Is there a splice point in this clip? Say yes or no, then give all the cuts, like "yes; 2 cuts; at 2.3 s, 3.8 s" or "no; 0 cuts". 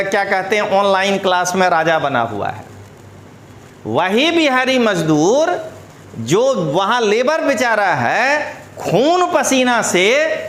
no; 0 cuts